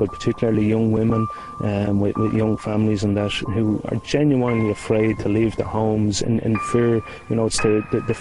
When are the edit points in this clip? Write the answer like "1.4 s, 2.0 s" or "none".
none

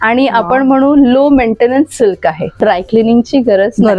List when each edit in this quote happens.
2.6 s

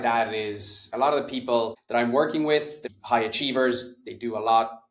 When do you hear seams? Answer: 0.9 s, 1.8 s, 2.8 s

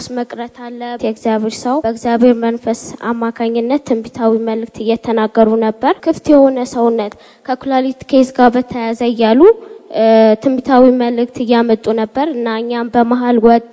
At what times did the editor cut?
1.0 s, 1.8 s, 6.0 s

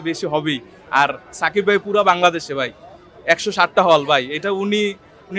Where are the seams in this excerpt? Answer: none

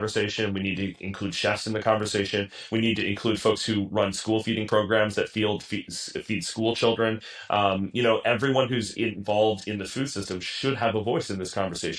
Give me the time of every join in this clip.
none

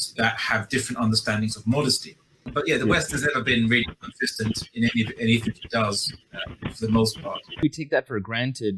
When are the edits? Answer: 2.5 s, 7.6 s

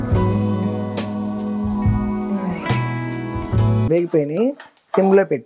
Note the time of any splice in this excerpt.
none

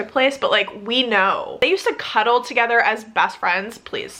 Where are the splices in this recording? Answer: none

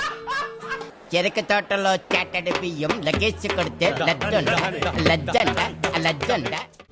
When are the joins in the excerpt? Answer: none

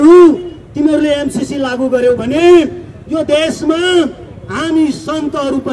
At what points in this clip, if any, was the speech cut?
none

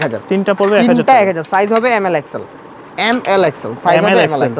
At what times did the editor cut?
none

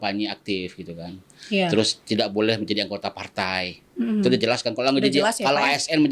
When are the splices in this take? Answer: none

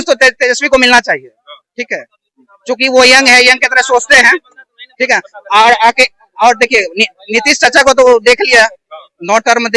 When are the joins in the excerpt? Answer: none

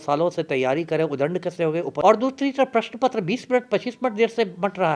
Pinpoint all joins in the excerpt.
2.0 s

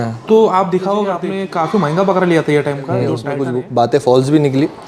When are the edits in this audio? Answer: 1.3 s, 3.3 s

